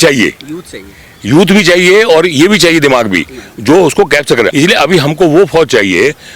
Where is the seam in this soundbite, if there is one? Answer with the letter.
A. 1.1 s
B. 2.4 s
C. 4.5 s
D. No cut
C